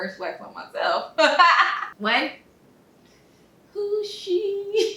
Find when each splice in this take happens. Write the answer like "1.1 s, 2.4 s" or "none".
1.9 s